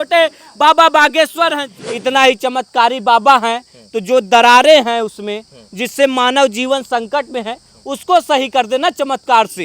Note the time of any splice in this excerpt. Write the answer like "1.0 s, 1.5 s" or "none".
1.6 s